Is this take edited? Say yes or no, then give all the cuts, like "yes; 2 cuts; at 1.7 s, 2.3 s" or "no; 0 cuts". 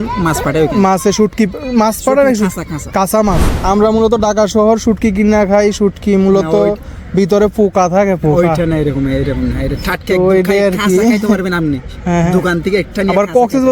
yes; 1 cut; at 3.5 s